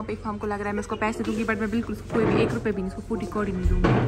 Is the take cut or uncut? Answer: uncut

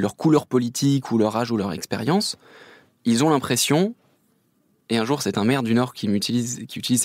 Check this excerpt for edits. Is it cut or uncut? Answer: uncut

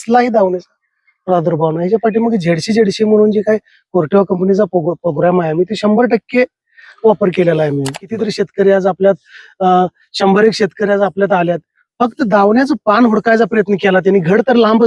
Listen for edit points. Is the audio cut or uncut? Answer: cut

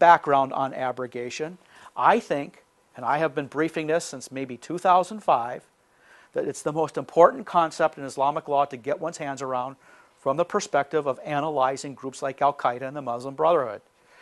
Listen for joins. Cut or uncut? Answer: uncut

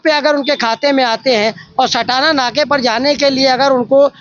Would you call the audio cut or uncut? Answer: uncut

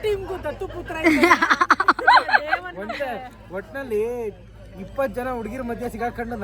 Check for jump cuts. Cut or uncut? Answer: uncut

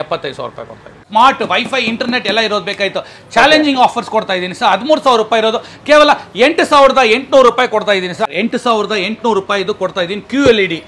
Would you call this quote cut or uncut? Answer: cut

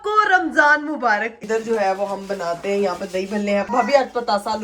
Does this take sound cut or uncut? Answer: cut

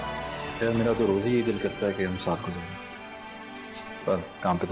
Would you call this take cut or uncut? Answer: uncut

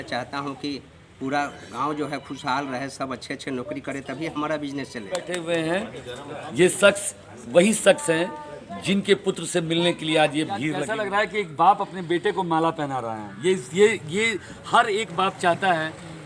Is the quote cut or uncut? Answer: cut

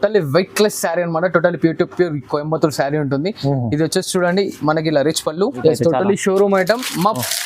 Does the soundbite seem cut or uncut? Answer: cut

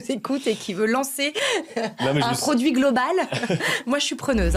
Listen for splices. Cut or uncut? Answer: uncut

